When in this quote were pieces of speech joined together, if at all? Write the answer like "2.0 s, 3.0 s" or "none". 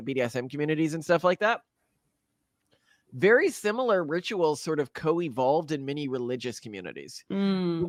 none